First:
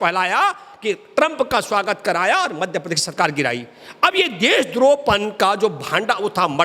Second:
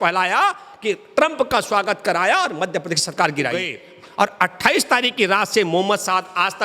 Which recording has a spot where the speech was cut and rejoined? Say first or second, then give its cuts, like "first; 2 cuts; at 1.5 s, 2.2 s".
second; 1 cut; at 3.8 s